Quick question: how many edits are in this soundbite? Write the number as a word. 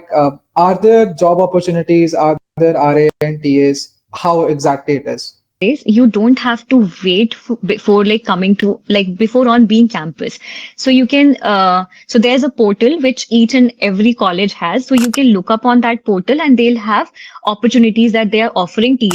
one